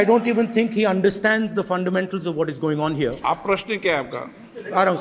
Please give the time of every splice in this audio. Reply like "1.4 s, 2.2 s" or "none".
none